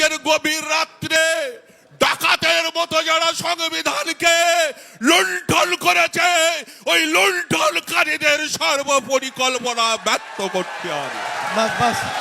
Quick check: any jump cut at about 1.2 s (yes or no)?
yes